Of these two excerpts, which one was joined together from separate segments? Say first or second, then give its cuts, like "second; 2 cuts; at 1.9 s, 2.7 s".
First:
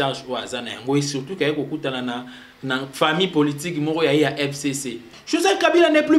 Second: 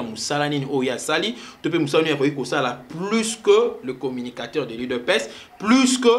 first; 1 cut; at 5.1 s